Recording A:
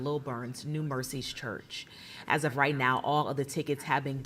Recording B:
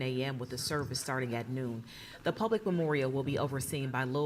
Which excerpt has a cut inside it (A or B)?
B